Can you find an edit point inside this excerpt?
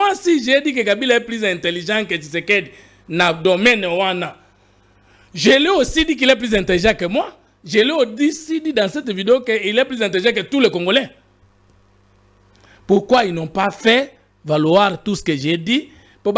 no; 0 cuts

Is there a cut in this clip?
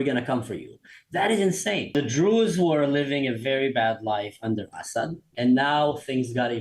yes; 2 cuts; at 1.9 s, 5.3 s

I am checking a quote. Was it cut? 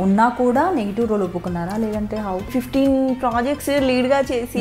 yes; 1 cut; at 2.5 s

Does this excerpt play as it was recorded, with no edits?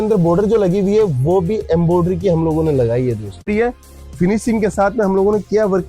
no; 1 cut; at 3.5 s

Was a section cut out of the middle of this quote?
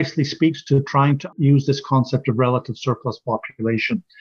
yes; 1 cut; at 1.3 s

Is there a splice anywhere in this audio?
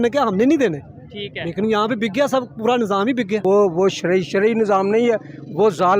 yes; 1 cut; at 3.4 s

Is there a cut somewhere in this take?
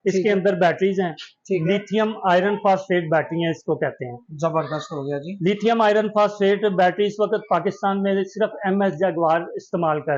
no; 0 cuts

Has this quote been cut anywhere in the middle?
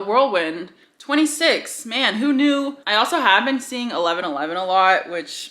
yes; 1 cut; at 2.8 s

